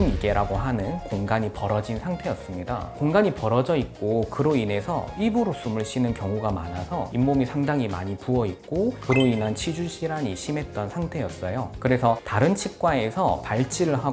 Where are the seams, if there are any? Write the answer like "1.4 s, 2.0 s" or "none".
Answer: none